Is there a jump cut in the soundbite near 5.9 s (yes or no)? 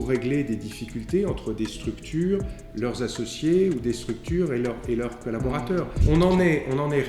yes